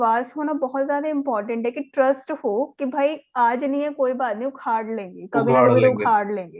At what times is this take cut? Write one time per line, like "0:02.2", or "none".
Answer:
none